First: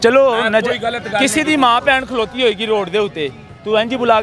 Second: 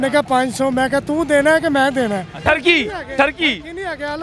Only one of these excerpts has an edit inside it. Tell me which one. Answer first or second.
second